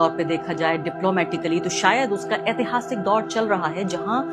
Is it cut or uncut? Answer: uncut